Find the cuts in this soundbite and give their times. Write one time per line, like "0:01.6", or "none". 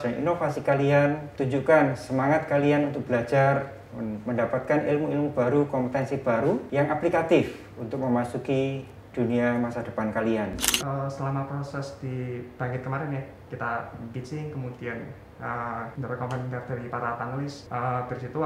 0:01.3
0:06.7
0:10.7
0:15.9
0:17.6